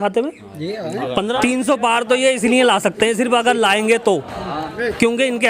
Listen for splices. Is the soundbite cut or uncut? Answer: cut